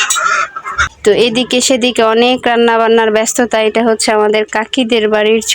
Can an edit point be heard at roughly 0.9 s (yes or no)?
yes